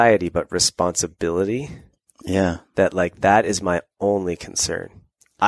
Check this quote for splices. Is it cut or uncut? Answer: uncut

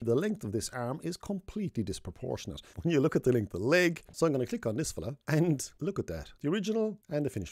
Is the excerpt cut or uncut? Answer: cut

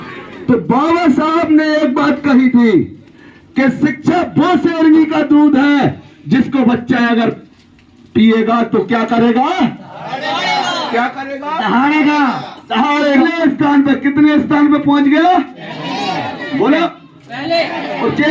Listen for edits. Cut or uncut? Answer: cut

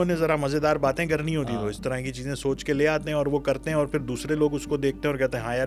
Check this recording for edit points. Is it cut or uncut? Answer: uncut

